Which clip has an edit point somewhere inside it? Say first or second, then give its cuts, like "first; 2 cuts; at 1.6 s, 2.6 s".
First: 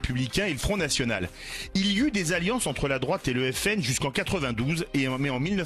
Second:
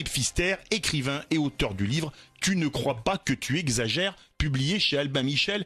second; 1 cut; at 3.1 s